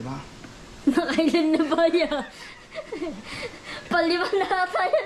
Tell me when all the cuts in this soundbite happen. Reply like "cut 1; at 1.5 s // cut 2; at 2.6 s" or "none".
none